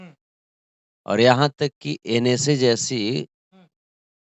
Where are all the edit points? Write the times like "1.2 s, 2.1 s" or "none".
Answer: none